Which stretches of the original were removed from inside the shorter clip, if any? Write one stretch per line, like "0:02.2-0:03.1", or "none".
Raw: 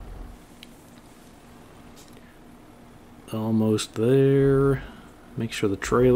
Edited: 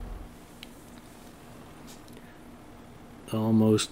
none